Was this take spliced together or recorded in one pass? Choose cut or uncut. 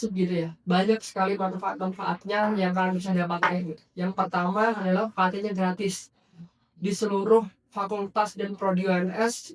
uncut